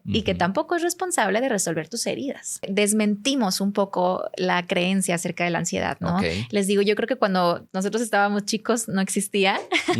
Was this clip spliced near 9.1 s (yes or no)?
no